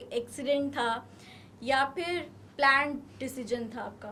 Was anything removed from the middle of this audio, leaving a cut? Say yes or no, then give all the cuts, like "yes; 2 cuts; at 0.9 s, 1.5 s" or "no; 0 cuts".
no; 0 cuts